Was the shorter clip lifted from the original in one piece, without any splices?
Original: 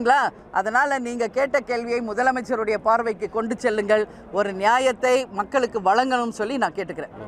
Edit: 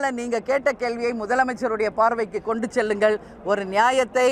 yes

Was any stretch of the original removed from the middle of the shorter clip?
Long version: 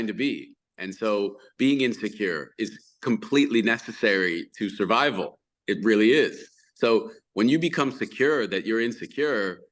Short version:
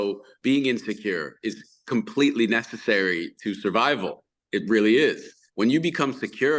yes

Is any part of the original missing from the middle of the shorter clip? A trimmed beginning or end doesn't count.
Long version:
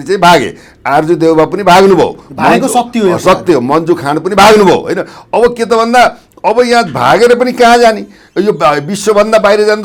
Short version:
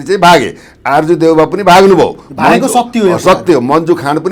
no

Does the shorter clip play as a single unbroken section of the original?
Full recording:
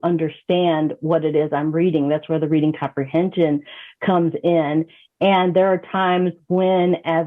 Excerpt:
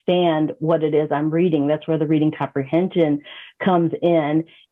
yes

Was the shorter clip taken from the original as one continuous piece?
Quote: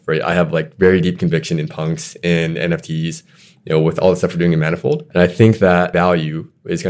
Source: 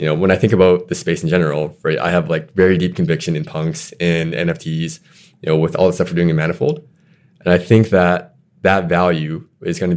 no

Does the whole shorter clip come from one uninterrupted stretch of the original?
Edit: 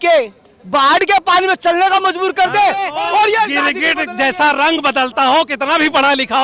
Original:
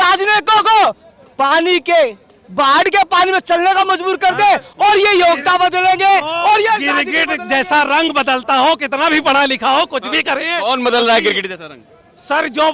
no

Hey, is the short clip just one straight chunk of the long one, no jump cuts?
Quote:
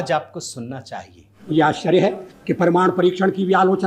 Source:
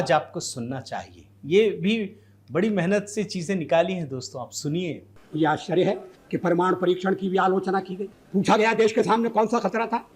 no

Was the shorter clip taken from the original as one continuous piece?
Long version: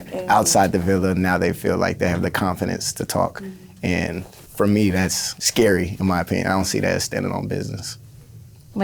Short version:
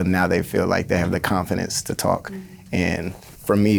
yes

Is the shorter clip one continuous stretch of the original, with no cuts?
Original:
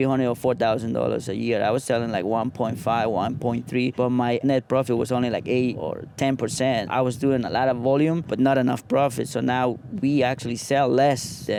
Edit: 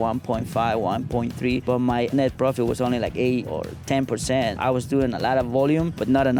yes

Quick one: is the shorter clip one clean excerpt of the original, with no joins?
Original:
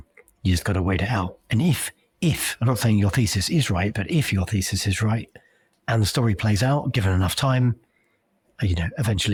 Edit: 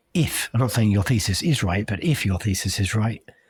yes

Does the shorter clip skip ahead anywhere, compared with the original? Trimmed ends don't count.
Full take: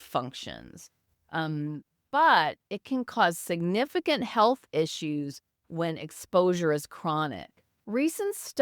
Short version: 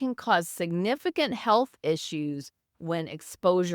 no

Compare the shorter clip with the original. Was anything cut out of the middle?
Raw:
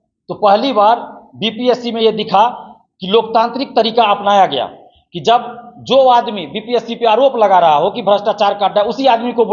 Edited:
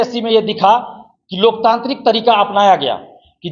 no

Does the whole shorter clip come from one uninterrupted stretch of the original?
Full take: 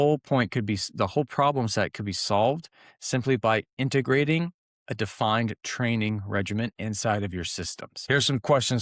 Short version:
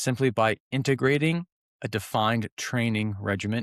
yes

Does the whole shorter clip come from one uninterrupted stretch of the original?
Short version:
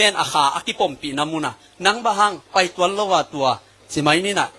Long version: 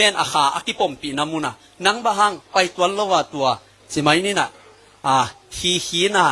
yes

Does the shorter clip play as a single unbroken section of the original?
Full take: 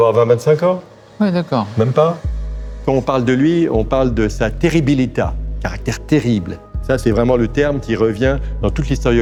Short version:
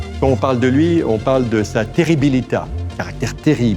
yes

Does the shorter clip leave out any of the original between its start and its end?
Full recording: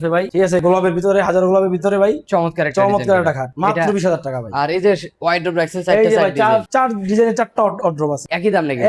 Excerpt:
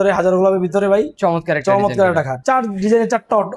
yes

